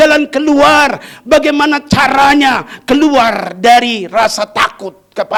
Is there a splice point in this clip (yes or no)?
no